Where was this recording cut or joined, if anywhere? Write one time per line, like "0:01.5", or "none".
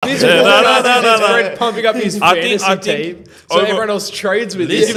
none